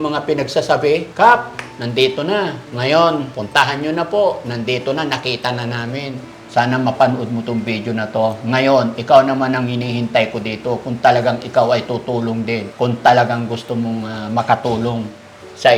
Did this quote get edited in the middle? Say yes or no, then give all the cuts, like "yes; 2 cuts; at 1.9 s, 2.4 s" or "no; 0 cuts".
yes; 5 cuts; at 1.1 s, 2.6 s, 3.4 s, 6.3 s, 12.7 s